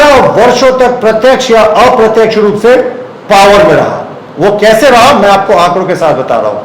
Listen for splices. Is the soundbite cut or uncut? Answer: uncut